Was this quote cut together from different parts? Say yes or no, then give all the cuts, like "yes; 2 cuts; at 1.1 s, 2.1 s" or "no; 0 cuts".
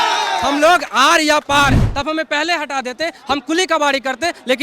yes; 1 cut; at 1.8 s